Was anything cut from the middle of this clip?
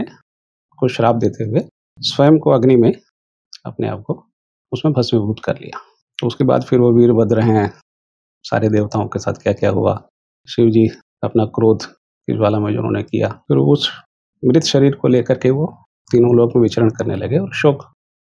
yes; 1 cut; at 13.4 s

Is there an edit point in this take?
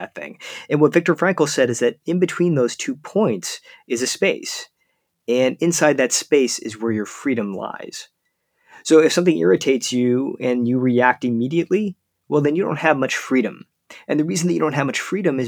no; 0 cuts

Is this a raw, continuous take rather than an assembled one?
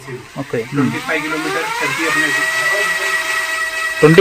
yes; 0 cuts

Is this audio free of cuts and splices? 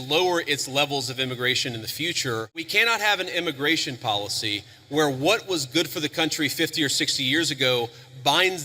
no; 1 cut; at 2.7 s

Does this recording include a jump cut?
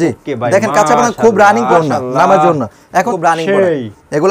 yes; 2 cuts; at 1.7 s, 3.1 s

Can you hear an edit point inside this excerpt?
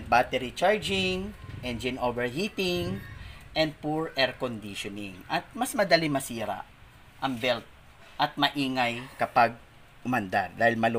no; 0 cuts

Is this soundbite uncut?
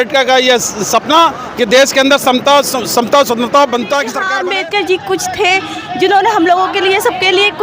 no; 1 cut; at 4.2 s

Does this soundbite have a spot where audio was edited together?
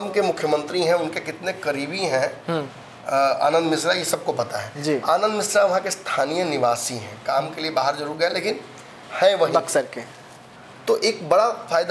no; 0 cuts

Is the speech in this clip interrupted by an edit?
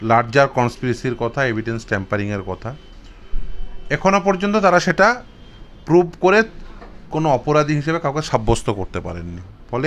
no; 0 cuts

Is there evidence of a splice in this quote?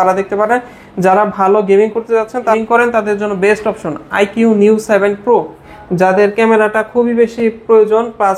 no; 0 cuts

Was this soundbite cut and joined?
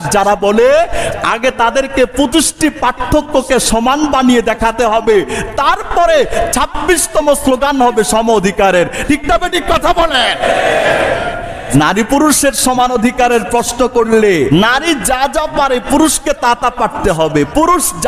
yes; 2 cuts; at 11.7 s, 14.5 s

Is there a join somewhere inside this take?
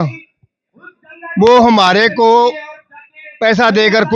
no; 0 cuts

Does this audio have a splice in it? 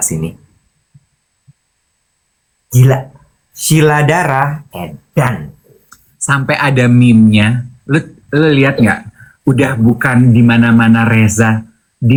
no; 0 cuts

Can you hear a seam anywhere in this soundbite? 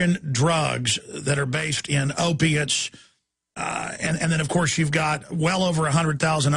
no; 0 cuts

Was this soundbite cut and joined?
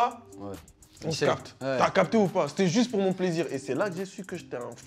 no; 0 cuts

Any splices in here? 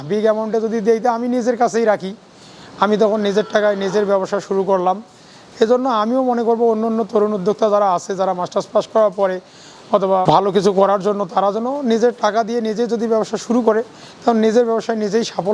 no; 0 cuts

